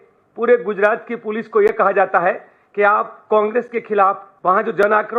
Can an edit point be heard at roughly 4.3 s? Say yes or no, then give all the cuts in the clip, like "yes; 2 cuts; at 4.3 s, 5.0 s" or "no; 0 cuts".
yes; 1 cut; at 4.3 s